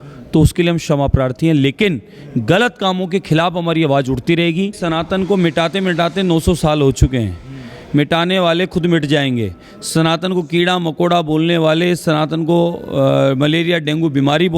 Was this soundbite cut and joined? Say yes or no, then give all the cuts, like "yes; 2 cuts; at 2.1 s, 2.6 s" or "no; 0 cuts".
yes; 1 cut; at 4.8 s